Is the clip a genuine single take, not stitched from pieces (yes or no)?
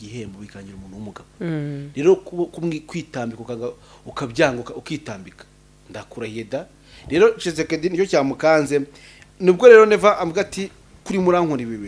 yes